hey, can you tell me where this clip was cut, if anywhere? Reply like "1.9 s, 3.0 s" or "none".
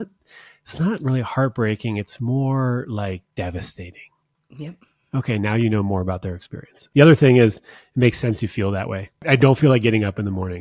6.8 s, 9.2 s